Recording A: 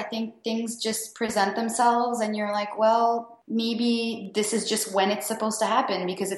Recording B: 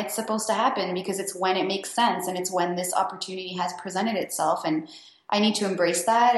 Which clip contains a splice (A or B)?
A